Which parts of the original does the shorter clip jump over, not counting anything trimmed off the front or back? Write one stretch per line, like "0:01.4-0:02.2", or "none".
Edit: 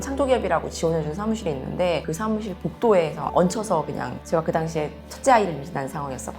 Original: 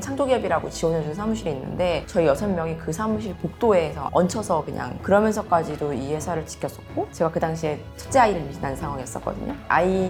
0:02.0-0:02.8
0:05.0-0:07.1